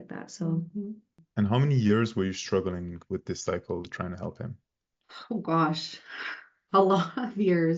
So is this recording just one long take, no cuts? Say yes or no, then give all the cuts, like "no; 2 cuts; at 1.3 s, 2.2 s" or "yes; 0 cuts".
no; 1 cut; at 1.2 s